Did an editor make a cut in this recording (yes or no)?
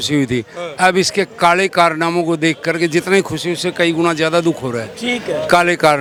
no